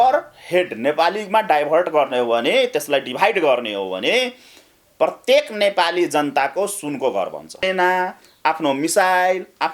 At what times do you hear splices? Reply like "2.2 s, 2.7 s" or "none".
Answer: 7.6 s